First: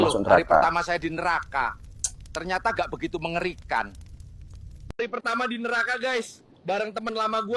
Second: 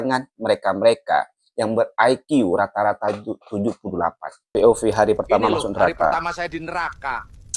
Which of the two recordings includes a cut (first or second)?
second